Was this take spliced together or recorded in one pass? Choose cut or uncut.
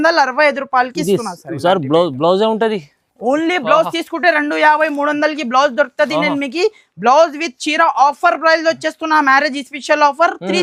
uncut